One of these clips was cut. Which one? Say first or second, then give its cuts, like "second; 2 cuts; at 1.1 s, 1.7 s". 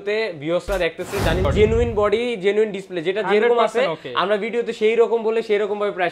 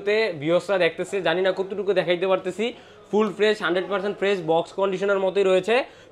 first; 1 cut; at 1.5 s